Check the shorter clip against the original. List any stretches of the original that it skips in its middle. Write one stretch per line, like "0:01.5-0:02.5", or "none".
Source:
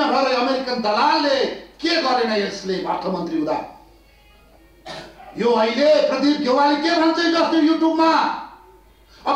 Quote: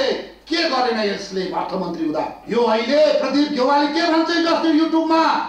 0:03.7-0:05.3